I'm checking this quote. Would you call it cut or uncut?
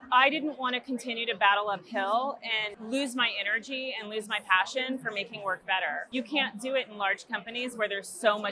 cut